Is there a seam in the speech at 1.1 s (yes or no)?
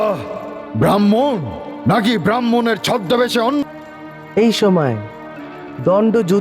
no